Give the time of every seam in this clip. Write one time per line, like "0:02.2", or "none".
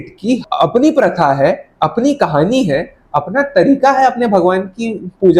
none